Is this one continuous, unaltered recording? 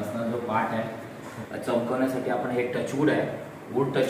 no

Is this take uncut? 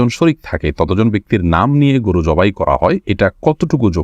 no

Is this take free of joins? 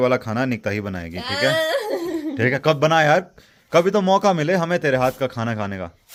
yes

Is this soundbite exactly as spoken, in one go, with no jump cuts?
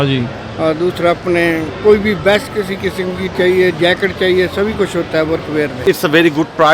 no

